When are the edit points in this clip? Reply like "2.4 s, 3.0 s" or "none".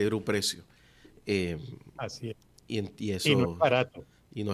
none